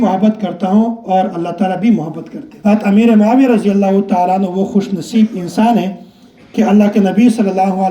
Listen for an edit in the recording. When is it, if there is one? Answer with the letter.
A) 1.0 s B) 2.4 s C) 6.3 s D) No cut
B